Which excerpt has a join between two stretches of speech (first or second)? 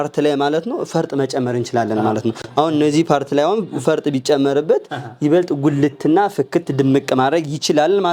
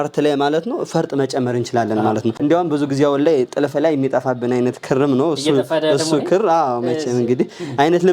second